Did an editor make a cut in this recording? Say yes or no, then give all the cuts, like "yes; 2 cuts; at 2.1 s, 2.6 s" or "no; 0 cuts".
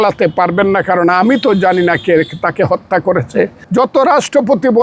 yes; 1 cut; at 3.6 s